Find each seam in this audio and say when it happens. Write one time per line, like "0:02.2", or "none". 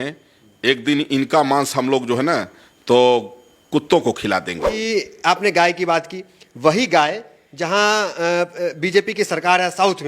0:04.7